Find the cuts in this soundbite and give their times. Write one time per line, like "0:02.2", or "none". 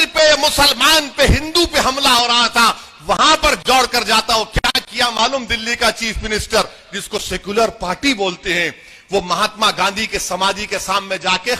none